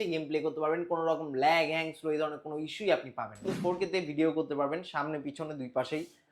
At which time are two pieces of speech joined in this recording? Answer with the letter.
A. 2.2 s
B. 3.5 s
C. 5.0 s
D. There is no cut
B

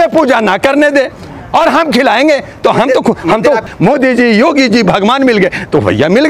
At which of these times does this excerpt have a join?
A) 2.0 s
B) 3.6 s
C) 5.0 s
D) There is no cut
B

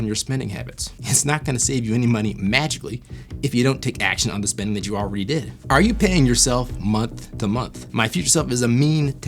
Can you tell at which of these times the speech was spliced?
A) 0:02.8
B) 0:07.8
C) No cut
B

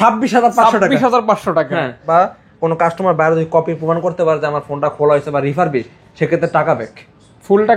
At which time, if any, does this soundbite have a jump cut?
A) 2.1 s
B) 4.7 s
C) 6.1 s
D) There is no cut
A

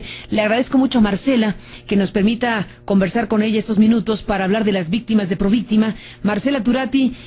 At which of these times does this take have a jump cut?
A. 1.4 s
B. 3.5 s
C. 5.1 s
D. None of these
B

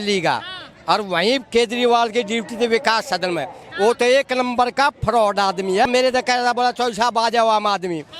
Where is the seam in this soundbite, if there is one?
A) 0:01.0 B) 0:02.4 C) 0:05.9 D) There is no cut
C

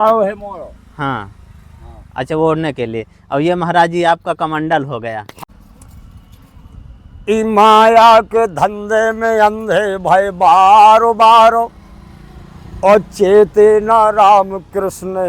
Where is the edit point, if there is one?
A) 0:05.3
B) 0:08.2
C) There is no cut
A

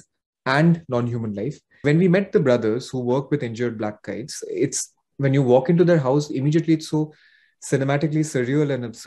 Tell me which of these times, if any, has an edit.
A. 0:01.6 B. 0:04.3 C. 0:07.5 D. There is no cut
A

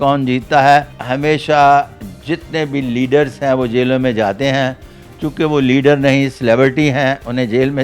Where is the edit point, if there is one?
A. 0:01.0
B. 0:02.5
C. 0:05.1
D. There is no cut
A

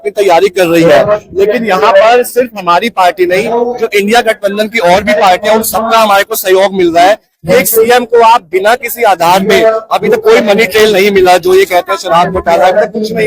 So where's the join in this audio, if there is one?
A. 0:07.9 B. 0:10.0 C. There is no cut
C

